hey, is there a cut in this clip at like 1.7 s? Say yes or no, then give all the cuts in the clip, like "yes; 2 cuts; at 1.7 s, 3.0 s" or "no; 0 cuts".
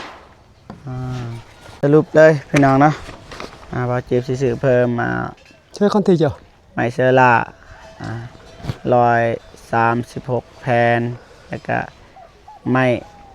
yes; 1 cut; at 1.7 s